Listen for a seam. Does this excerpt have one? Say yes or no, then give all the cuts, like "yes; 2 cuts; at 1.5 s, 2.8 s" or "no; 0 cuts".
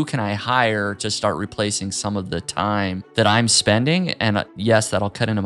yes; 2 cuts; at 3.0 s, 4.5 s